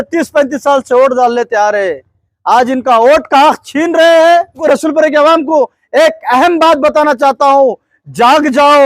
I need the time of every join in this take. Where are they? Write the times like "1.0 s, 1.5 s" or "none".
4.6 s